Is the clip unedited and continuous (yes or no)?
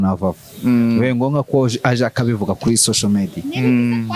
yes